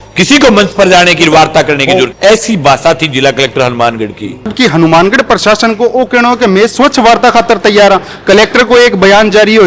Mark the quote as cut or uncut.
cut